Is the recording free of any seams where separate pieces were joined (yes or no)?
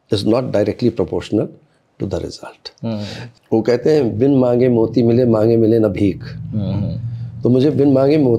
no